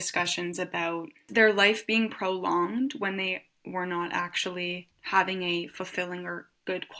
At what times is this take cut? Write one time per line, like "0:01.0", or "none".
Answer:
0:01.3
0:04.9